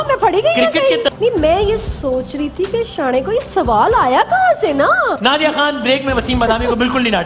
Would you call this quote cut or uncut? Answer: cut